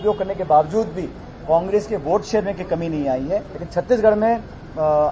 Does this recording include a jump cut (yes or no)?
yes